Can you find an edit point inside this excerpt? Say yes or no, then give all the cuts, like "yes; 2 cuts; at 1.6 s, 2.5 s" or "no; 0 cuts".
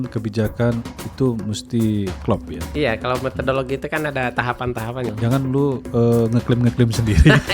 yes; 2 cuts; at 2.6 s, 5.1 s